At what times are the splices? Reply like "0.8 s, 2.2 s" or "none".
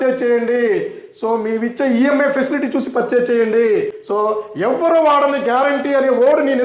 4.0 s